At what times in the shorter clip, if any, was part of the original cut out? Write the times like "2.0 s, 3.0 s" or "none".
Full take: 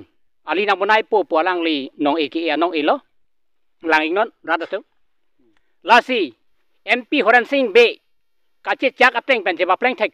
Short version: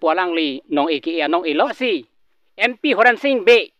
1.8 s

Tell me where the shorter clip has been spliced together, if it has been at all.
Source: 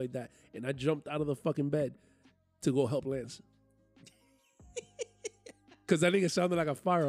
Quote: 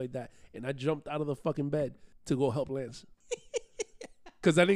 2.1 s, 3.1 s

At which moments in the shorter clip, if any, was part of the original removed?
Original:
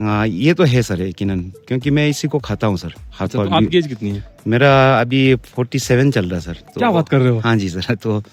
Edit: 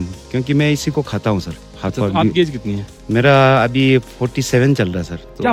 none

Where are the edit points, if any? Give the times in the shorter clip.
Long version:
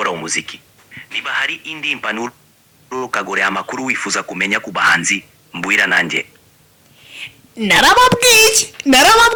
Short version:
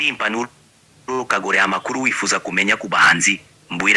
none

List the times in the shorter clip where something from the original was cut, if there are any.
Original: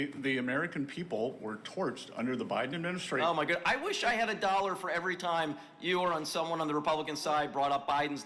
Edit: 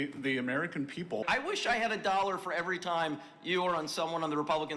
1.2 s

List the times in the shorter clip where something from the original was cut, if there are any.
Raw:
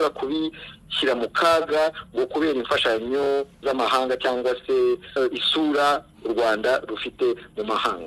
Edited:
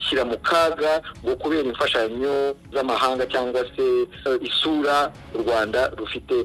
none

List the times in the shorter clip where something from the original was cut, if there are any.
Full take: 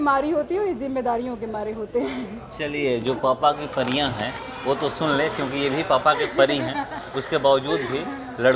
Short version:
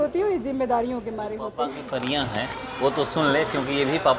1.8 s

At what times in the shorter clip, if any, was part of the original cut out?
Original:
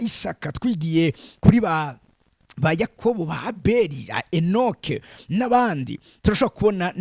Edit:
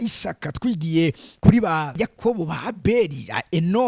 2.0 s

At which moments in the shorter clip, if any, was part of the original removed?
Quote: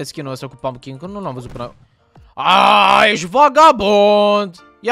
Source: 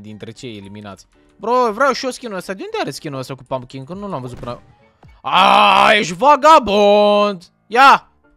none

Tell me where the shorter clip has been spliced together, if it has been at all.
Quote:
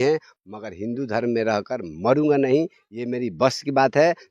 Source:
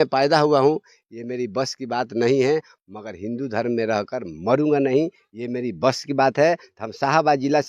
none

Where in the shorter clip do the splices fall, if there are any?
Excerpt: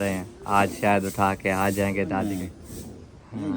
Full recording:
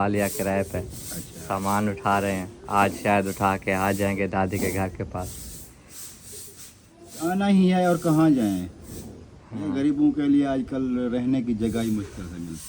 2.3 s

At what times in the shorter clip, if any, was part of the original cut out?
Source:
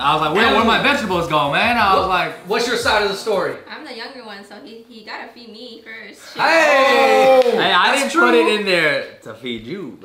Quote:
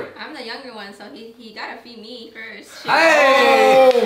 none

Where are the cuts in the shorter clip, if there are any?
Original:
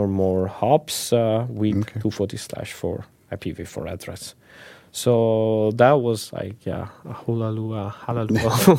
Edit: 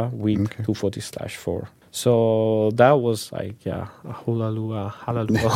1.8 s

